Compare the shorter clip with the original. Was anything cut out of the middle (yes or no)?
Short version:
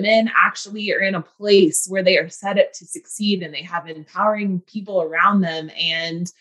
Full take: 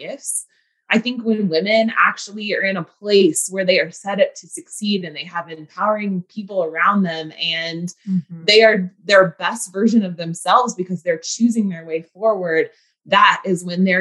no